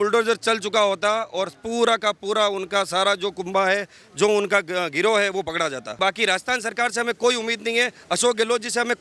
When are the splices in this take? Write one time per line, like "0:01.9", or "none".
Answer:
0:05.9